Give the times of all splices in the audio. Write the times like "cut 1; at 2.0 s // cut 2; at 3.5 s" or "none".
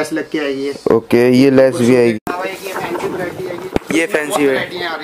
cut 1; at 2.1 s